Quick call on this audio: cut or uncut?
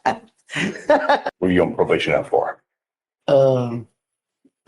cut